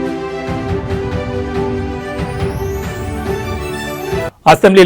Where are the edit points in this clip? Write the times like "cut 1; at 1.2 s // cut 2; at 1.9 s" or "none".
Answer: cut 1; at 3.6 s